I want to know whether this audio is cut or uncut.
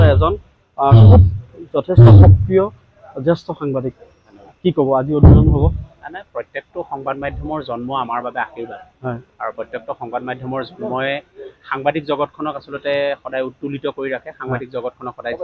uncut